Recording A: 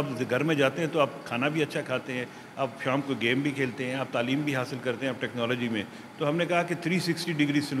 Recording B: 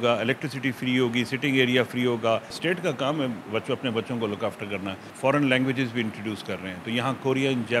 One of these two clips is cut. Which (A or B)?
B